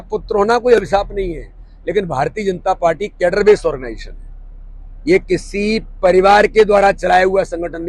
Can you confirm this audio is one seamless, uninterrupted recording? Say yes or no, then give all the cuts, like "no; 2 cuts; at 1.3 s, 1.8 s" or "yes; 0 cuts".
yes; 0 cuts